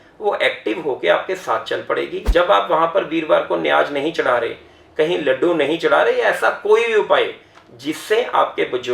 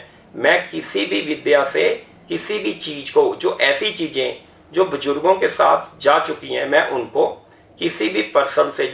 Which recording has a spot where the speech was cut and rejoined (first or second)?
first